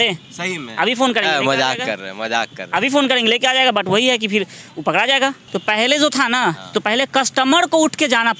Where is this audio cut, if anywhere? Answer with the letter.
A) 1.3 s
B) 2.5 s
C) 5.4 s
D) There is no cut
C